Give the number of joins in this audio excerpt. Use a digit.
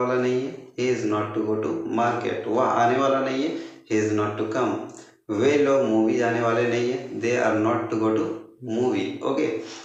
0